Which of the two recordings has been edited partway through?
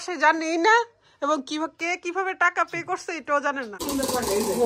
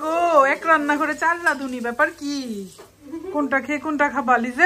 first; 1 cut; at 3.7 s

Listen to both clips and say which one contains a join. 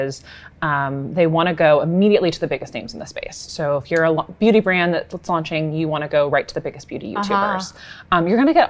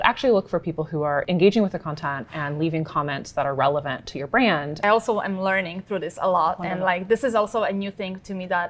second; 2 cuts; at 1.2 s, 4.8 s

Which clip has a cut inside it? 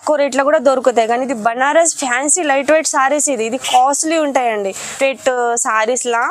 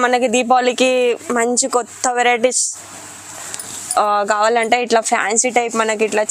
first; 1 cut; at 4.9 s

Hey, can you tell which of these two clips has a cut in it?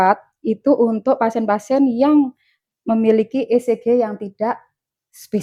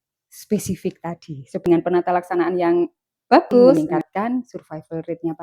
second; 2 cuts; at 1.6 s, 3.7 s

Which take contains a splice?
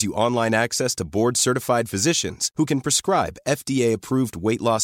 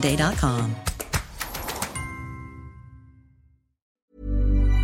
second; 1 cut; at 3.9 s

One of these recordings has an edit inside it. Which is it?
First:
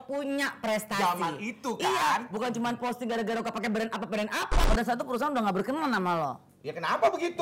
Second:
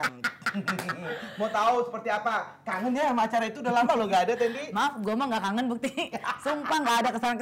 first; 1 cut; at 4.6 s

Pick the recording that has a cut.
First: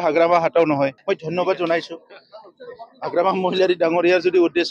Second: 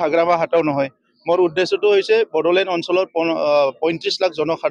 first; 1 cut; at 1.0 s

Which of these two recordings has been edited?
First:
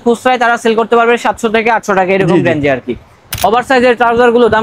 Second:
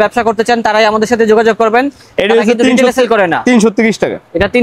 first; 1 cut; at 3.3 s

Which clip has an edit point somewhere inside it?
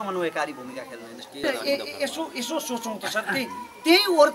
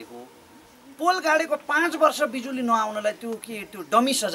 first; 1 cut; at 1.4 s

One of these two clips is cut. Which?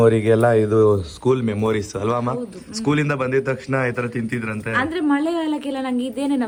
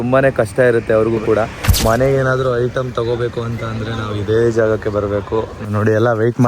second; 2 cuts; at 1.7 s, 5.6 s

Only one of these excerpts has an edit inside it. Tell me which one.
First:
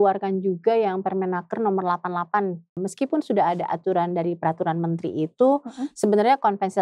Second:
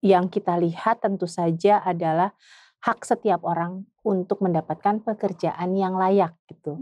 first; 1 cut; at 2.8 s

